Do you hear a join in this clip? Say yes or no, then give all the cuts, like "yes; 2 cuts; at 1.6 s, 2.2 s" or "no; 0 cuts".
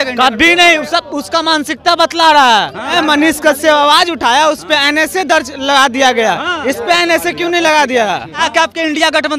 yes; 2 cuts; at 2.9 s, 8.5 s